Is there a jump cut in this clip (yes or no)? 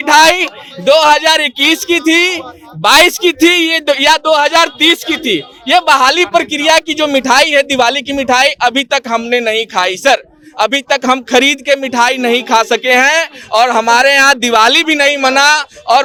no